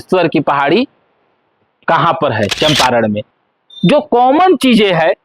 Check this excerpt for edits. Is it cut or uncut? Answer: cut